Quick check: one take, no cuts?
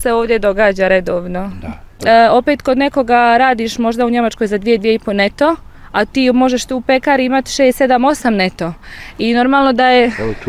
no; 1 cut; at 2.0 s

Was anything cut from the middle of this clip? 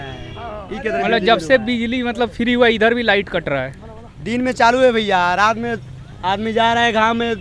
no; 0 cuts

